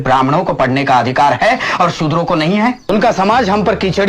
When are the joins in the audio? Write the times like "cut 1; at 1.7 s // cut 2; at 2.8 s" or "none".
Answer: cut 1; at 2.9 s